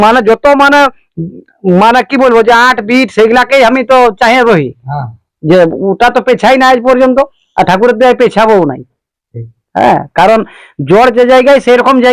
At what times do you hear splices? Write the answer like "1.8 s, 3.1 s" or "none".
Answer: none